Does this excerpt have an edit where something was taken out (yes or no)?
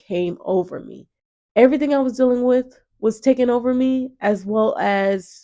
yes